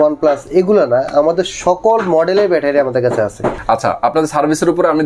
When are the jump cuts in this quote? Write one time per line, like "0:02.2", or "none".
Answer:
0:03.6